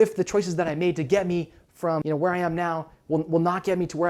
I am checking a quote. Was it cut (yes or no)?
yes